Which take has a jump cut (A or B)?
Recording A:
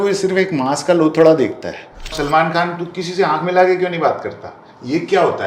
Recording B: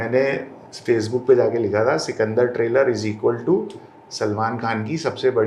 A